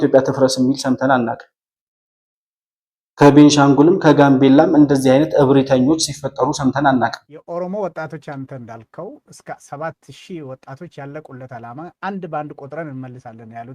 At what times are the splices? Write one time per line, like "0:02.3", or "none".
0:07.3